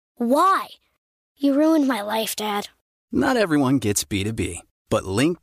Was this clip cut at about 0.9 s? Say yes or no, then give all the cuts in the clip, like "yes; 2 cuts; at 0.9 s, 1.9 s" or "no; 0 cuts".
no; 0 cuts